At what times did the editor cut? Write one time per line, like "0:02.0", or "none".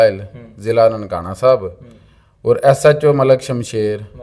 none